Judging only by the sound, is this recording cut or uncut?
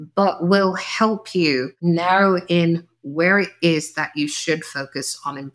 cut